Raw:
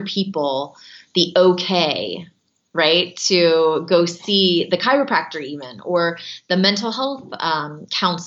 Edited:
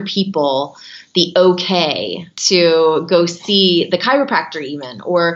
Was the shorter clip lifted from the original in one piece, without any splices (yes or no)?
no